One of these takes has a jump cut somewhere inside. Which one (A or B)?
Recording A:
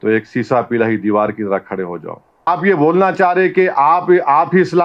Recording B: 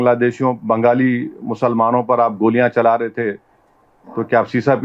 A